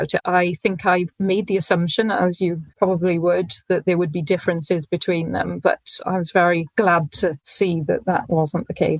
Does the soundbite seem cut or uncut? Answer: uncut